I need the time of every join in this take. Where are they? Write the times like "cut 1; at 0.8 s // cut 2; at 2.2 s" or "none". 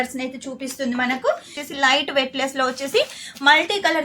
cut 1; at 1.6 s